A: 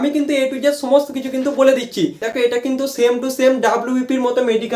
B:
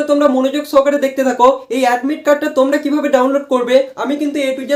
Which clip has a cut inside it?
A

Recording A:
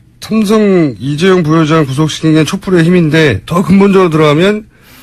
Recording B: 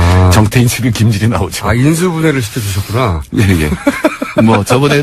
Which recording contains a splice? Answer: B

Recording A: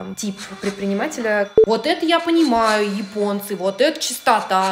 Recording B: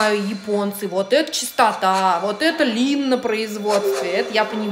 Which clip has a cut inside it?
A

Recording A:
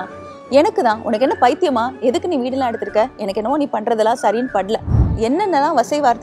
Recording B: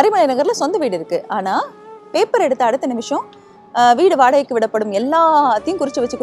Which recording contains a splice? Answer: A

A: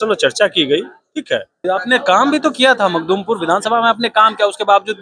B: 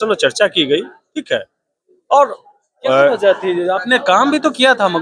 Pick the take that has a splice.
A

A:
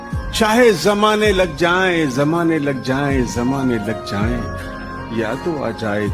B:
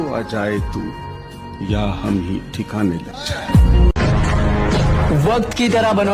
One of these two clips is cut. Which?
B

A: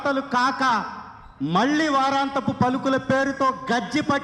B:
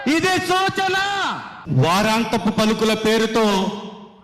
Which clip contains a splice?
B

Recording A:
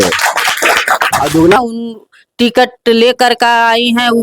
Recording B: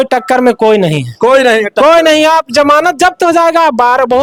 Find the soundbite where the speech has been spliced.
A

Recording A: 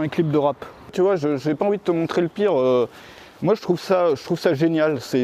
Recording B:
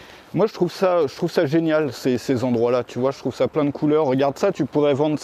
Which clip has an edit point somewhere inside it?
A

